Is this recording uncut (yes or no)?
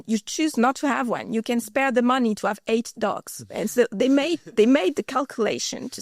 yes